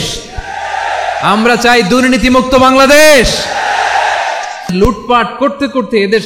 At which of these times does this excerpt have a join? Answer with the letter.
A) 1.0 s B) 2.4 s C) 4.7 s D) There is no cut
C